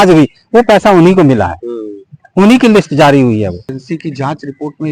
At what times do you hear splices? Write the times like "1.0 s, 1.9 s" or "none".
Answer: 3.7 s